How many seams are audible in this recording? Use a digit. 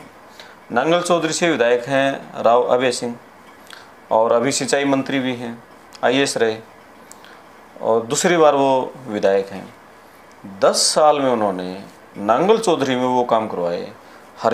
0